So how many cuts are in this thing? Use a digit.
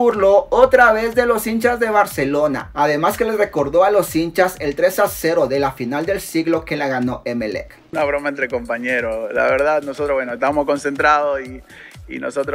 1